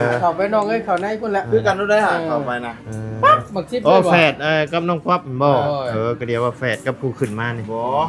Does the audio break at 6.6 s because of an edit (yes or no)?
no